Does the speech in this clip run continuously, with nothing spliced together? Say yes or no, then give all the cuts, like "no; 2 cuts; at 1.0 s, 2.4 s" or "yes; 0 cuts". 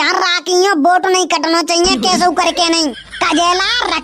yes; 0 cuts